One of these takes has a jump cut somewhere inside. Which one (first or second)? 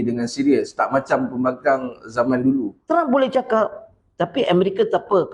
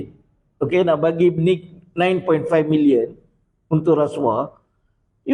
first